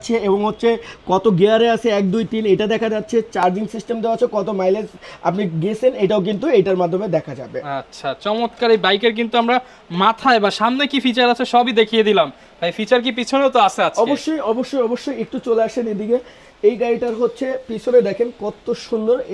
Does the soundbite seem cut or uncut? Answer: uncut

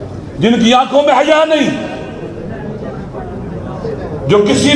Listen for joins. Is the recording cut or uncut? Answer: uncut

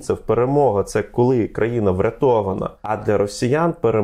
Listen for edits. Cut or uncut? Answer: cut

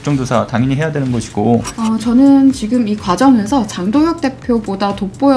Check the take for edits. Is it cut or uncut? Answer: cut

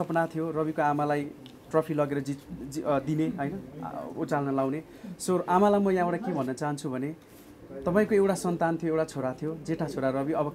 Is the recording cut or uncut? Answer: uncut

